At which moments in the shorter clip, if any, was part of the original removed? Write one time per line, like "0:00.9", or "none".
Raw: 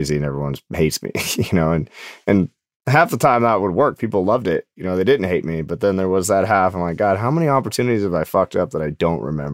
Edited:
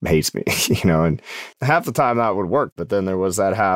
0:01.4
0:02.8